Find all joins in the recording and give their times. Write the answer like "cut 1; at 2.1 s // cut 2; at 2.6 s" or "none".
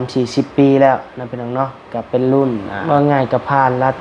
cut 1; at 2.7 s

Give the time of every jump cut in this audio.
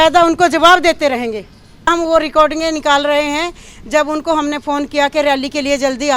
cut 1; at 1.9 s

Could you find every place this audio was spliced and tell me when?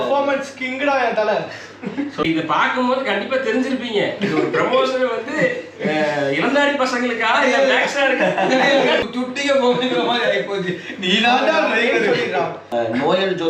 cut 1; at 2.1 s // cut 2; at 9.0 s // cut 3; at 12.6 s

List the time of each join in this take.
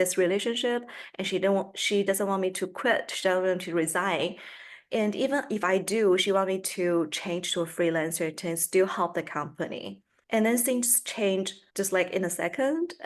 none

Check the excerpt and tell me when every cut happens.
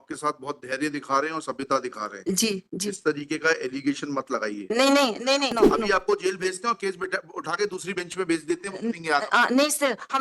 cut 1; at 5.5 s

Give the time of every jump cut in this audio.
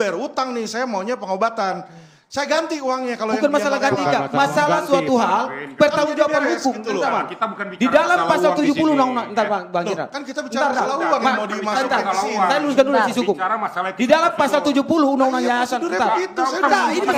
none

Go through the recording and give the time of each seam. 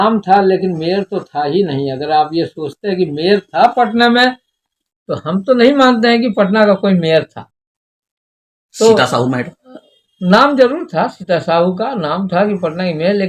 none

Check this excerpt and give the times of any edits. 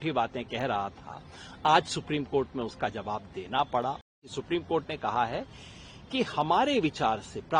cut 1; at 4.2 s

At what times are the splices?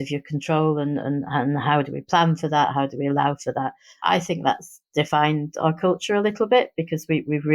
cut 1; at 4.0 s

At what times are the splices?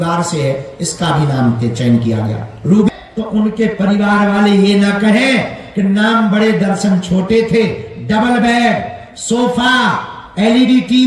cut 1; at 2.9 s

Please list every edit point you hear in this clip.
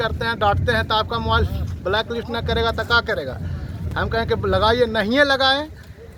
none

